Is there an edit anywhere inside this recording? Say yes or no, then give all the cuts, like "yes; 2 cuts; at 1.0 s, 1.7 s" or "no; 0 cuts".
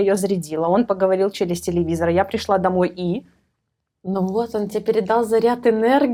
no; 0 cuts